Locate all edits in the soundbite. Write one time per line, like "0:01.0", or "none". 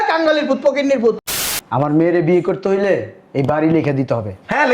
0:01.3